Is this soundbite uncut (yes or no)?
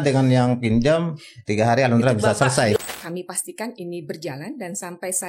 no